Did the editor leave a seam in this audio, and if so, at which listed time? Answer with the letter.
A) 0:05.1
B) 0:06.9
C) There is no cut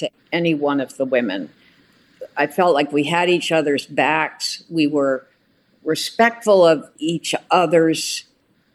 B